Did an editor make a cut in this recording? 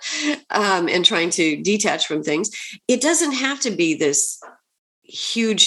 no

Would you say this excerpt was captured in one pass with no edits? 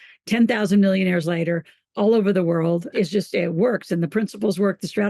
no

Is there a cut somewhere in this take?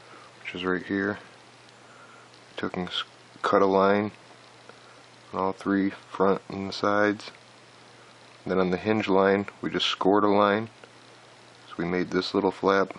yes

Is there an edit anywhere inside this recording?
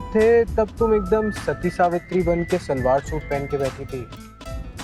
no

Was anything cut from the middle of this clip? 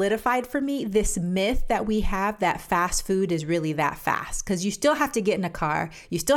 no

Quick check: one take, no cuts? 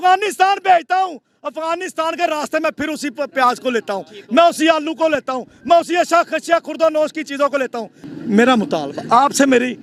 yes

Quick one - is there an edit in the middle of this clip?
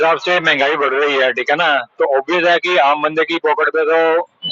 no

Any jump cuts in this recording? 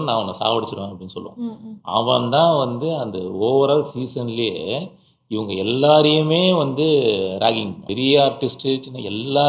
yes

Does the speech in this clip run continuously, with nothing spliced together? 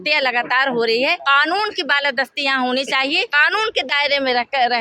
no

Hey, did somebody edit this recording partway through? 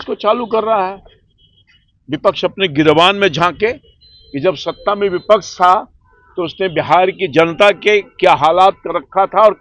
no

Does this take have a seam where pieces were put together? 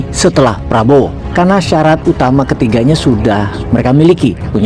yes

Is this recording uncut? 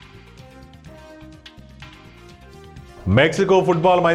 yes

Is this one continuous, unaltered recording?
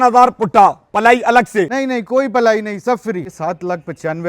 no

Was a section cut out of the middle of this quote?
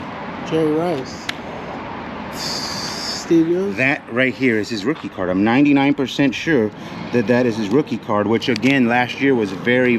no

